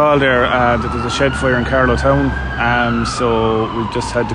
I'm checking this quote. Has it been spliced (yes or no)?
no